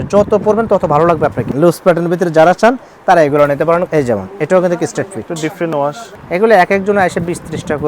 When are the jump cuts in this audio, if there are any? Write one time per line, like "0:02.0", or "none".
0:01.5
0:03.9
0:06.1